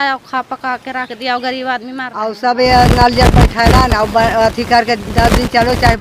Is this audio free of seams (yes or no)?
no